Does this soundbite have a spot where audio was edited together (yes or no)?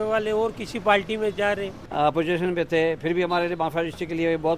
yes